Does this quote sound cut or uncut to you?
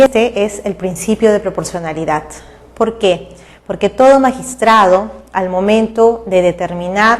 cut